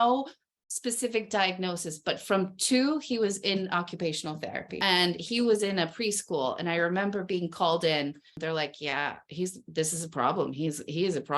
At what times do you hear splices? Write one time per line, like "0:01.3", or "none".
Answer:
0:04.7
0:08.4